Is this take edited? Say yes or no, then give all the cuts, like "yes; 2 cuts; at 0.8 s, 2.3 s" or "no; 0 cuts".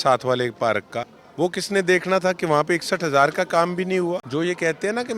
yes; 2 cuts; at 1.2 s, 4.3 s